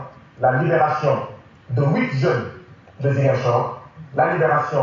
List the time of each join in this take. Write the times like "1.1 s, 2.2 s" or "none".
none